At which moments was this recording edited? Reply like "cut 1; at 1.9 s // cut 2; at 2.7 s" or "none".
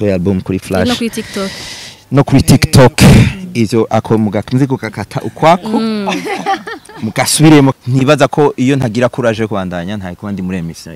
cut 1; at 7.7 s